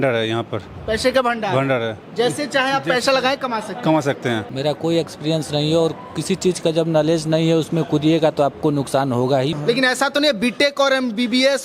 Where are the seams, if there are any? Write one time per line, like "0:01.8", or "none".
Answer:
0:04.5
0:09.6